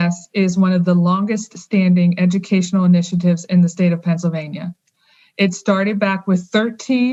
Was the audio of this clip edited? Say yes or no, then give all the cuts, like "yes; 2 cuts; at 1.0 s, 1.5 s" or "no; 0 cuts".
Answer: no; 0 cuts